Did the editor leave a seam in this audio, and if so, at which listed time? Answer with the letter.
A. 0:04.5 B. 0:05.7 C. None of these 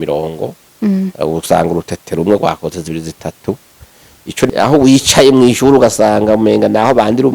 A